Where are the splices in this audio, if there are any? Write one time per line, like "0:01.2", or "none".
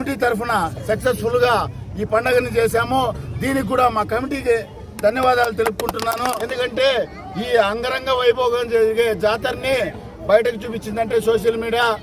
0:06.4

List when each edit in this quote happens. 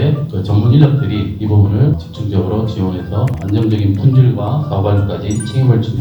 none

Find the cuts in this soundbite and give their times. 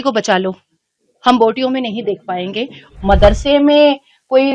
0:02.8

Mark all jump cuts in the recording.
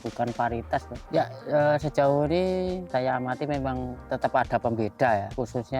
0:01.0

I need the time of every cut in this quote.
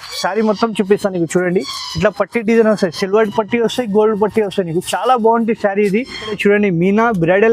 0:06.2

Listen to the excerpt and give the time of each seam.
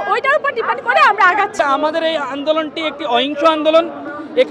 0:01.5

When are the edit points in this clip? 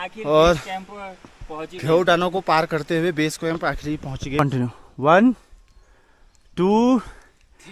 0:04.4

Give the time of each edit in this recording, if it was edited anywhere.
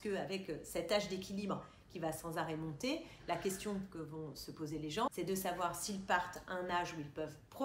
none

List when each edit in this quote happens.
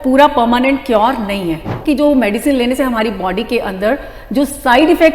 0:01.8

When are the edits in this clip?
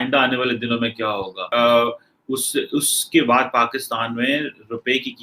0:01.4

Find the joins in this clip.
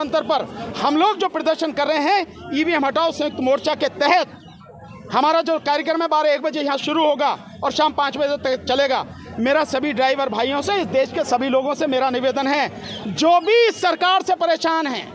none

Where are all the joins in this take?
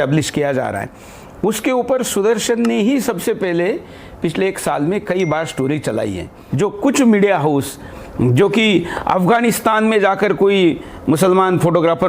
0:06.4

